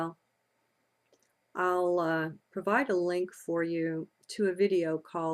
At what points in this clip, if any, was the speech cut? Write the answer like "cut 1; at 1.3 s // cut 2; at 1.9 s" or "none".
cut 1; at 4.1 s